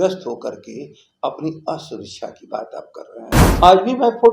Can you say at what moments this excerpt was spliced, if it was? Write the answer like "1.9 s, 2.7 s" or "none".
3.3 s